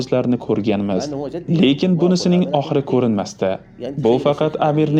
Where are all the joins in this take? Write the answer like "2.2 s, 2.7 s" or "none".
none